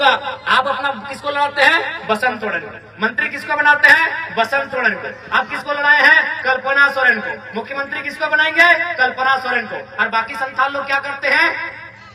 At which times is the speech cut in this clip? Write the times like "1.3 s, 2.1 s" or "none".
none